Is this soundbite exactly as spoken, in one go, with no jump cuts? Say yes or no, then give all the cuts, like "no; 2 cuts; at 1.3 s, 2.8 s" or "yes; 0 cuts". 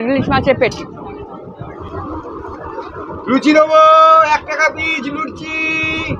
no; 1 cut; at 1.8 s